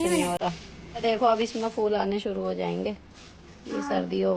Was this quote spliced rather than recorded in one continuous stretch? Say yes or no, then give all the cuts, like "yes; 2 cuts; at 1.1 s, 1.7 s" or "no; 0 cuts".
yes; 1 cut; at 1.0 s